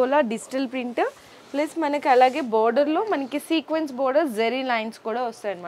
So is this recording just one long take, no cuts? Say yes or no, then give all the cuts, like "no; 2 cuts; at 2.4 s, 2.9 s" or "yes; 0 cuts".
yes; 0 cuts